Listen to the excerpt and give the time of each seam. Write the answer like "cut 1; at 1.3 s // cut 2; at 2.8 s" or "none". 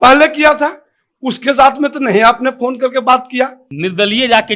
cut 1; at 3.6 s